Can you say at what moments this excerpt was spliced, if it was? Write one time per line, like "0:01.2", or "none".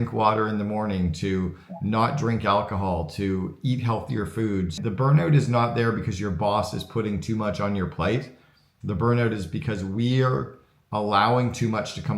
0:04.8